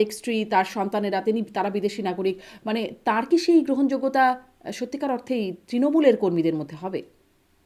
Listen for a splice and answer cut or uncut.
uncut